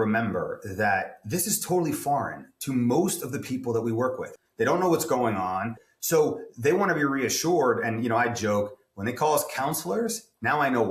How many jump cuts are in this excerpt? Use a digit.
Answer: 2